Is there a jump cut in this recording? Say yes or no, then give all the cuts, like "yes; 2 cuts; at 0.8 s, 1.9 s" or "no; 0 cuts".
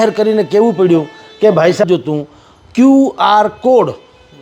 yes; 1 cut; at 1.8 s